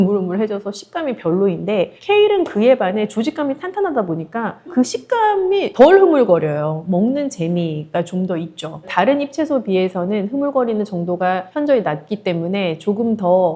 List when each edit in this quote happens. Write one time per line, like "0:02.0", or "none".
none